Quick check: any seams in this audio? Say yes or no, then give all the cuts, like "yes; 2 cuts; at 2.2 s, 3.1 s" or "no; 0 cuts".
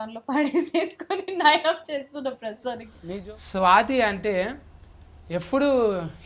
yes; 1 cut; at 2.9 s